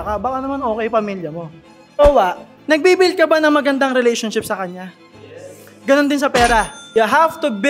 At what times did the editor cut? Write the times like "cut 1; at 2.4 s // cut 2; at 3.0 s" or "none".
cut 1; at 1.8 s